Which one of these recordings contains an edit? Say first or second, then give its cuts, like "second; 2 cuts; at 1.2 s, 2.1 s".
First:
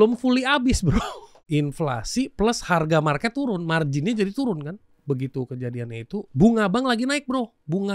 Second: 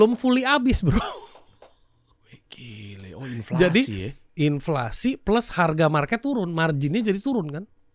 first; 3 cuts; at 1.3 s, 4.9 s, 6.3 s